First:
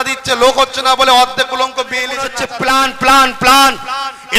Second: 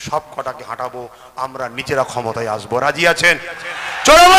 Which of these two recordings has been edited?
first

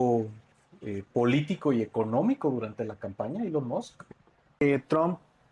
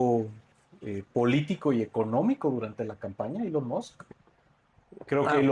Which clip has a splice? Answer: first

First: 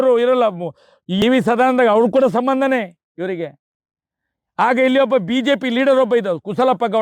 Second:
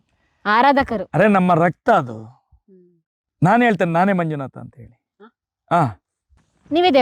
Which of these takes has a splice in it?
first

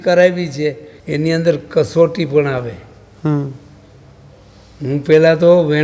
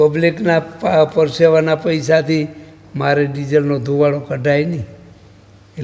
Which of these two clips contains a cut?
first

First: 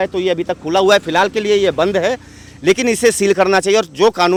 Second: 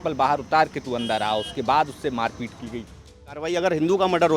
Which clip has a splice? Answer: second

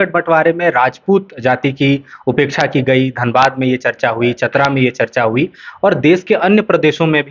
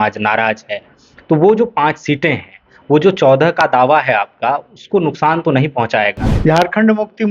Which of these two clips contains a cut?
second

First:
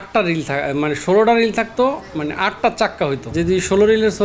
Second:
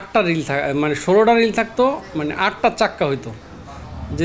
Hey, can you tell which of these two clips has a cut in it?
first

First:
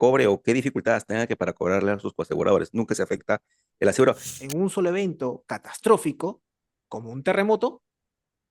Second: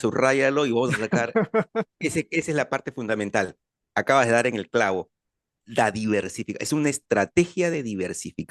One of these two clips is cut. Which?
first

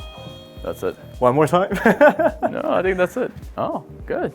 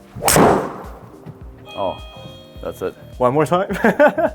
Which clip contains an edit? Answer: first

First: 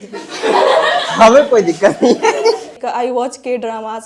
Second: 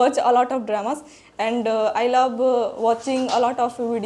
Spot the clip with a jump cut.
first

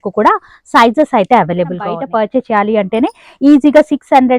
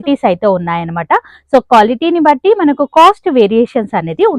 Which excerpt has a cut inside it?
first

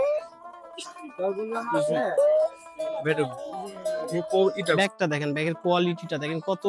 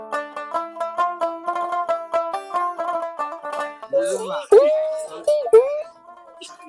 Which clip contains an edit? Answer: first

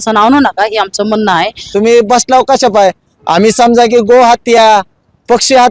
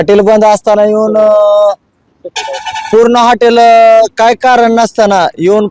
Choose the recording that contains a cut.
first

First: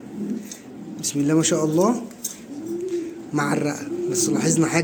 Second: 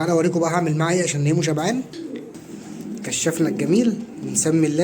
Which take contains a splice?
second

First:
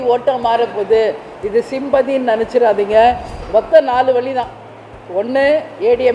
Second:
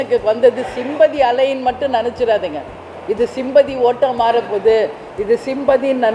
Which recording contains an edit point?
first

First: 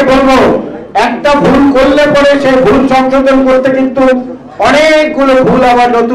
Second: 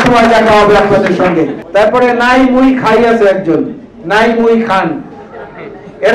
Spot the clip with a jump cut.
second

